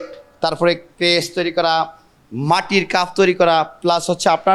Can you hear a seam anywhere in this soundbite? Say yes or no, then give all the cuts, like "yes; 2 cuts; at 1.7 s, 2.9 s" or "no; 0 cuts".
no; 0 cuts